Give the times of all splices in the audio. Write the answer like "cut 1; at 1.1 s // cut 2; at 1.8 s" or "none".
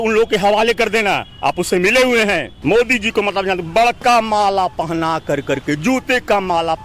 cut 1; at 2.5 s